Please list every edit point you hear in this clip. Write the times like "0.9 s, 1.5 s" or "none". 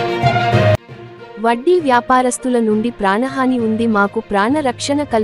0.9 s

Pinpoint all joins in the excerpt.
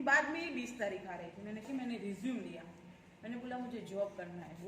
1.7 s

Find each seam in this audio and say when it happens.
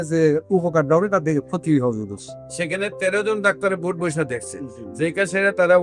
none

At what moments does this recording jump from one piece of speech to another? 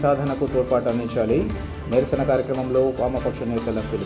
none

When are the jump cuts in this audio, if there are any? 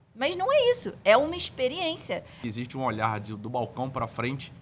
2.4 s

